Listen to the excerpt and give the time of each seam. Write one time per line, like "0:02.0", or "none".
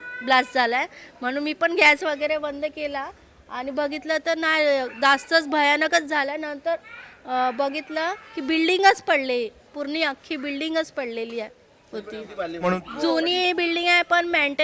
0:12.7